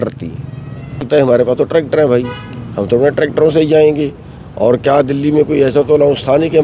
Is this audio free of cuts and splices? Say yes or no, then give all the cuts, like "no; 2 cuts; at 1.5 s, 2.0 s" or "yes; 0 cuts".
no; 1 cut; at 1.1 s